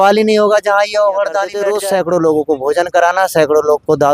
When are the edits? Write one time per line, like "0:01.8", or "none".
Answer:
0:01.6